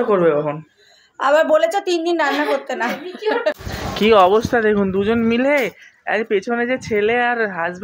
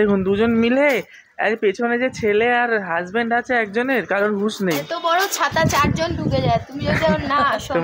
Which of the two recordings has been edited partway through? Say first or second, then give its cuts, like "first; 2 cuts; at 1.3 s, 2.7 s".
first; 1 cut; at 3.6 s